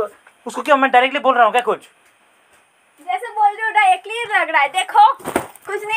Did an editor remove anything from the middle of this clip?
no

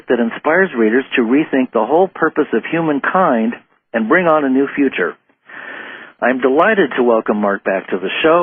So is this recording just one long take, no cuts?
yes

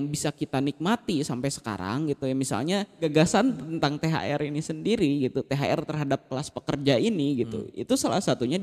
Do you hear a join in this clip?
yes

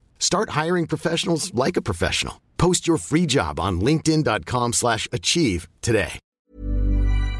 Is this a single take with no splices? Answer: no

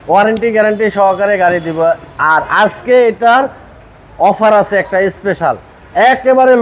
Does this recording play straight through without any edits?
yes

